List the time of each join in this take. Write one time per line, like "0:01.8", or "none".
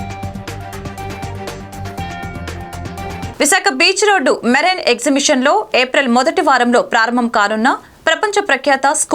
0:03.3